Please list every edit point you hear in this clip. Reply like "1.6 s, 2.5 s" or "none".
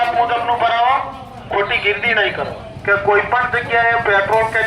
2.7 s